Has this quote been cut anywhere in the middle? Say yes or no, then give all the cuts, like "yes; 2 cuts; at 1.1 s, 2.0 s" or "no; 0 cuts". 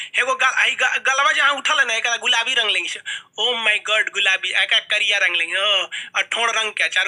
no; 0 cuts